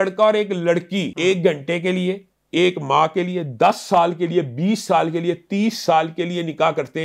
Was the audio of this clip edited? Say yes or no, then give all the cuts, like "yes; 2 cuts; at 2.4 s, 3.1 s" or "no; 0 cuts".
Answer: yes; 1 cut; at 1.1 s